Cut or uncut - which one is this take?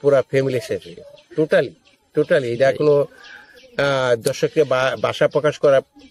uncut